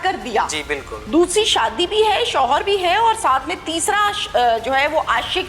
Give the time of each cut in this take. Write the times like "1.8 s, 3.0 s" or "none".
0.9 s